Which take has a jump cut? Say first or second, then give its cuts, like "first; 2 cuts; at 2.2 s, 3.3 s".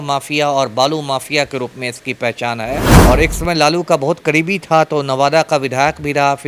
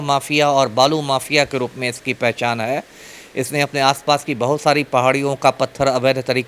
first; 1 cut; at 2.9 s